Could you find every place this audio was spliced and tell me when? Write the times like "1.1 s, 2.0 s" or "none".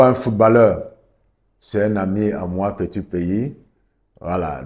none